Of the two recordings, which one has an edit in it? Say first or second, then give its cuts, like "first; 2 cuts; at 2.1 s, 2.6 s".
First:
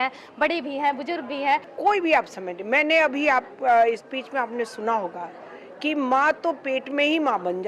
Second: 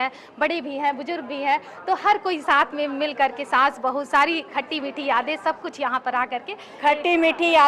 first; 1 cut; at 1.7 s